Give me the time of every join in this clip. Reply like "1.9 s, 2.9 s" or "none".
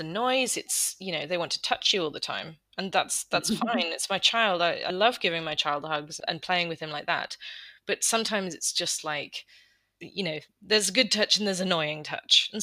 4.9 s, 6.2 s, 10.0 s